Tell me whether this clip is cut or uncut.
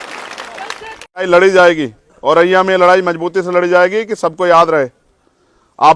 cut